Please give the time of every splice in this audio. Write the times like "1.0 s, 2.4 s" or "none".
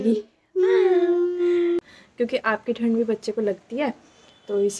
1.8 s